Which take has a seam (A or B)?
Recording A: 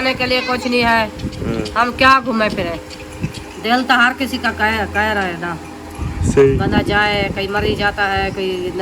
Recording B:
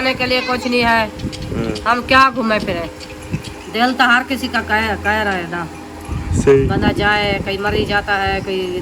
A